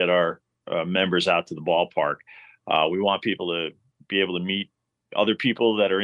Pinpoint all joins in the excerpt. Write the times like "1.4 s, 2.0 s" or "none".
none